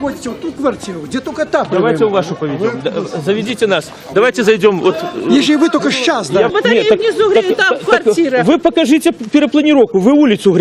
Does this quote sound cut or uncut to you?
cut